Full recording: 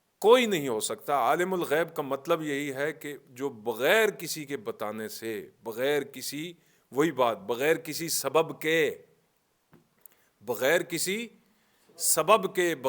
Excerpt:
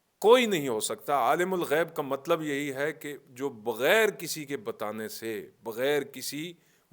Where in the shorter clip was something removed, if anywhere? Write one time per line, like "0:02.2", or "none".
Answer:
none